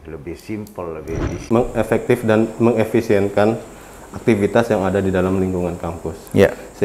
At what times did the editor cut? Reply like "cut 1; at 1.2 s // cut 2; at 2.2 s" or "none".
cut 1; at 1.5 s